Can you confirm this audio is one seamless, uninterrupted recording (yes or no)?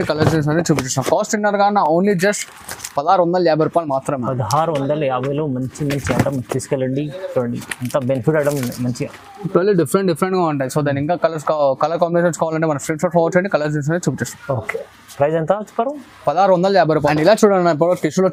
yes